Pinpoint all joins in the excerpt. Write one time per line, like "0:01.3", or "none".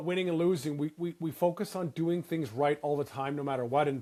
none